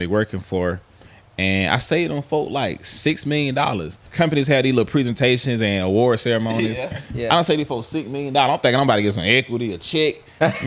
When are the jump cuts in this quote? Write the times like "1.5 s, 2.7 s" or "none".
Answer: 4.1 s

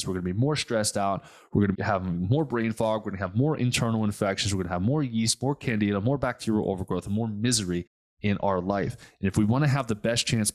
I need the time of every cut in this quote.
1.7 s

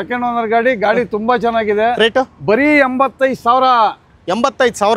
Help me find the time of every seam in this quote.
none

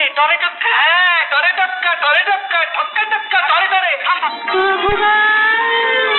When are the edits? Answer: none

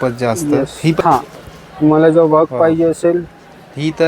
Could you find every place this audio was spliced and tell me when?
1.0 s

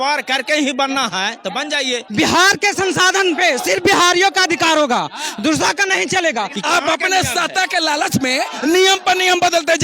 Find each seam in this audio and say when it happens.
2.0 s, 6.5 s

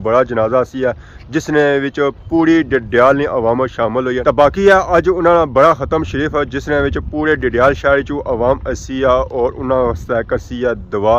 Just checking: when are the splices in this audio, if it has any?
4.2 s

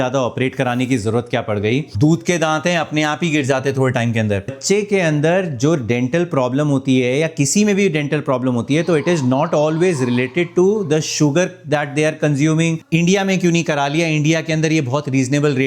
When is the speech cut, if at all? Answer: 1.9 s, 4.6 s, 12.8 s

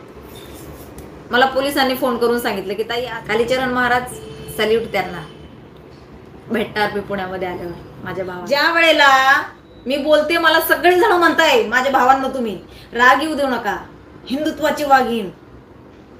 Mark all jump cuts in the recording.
2.9 s, 8.4 s

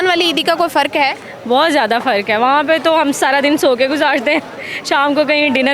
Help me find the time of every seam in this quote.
none

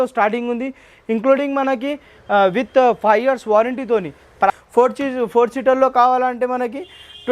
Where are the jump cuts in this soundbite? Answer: 4.1 s

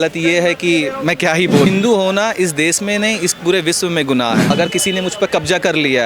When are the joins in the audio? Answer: 1.7 s, 4.5 s

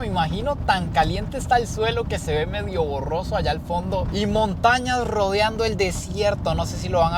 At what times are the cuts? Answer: none

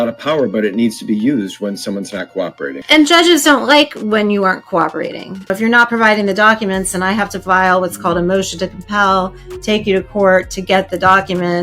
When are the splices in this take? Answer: 2.8 s, 5.5 s

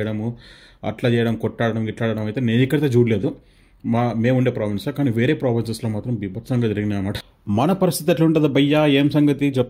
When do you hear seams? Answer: 7.2 s

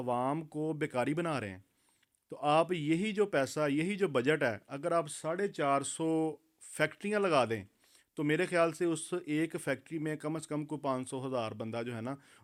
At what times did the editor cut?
none

